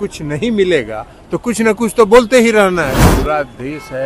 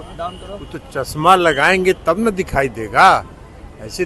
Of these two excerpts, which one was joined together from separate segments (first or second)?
first